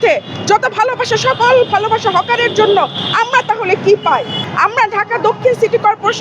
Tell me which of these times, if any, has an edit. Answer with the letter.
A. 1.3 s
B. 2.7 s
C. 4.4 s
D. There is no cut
C